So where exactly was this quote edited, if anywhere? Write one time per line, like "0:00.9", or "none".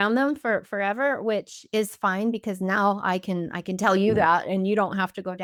none